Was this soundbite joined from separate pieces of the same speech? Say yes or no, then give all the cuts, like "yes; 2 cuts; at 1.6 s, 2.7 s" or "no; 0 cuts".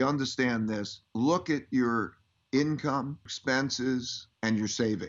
yes; 3 cuts; at 1.0 s, 3.3 s, 4.2 s